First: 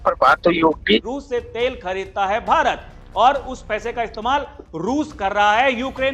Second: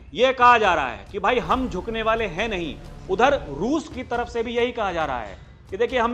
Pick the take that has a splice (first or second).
first